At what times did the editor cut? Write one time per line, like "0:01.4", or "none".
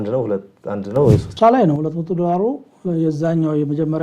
0:01.3

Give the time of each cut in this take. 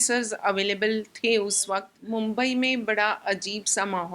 0:01.9

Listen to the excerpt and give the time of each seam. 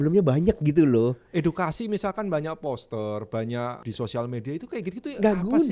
0:03.8

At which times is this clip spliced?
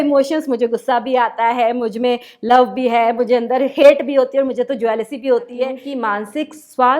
0:05.8

